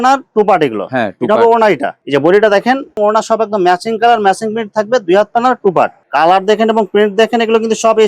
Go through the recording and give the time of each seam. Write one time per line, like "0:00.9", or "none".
0:02.0
0:06.0